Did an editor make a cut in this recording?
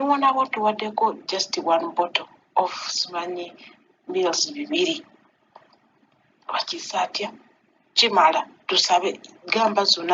no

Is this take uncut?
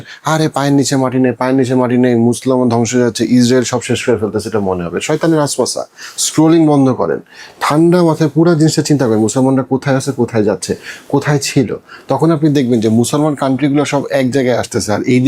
yes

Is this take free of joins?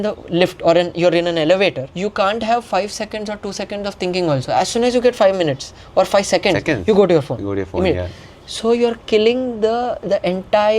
no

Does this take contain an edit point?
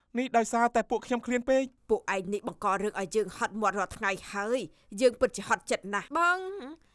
yes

